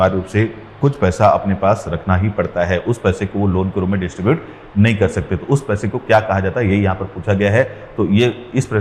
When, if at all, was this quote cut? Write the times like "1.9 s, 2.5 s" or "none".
none